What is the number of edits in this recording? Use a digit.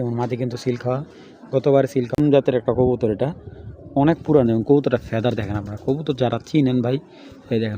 1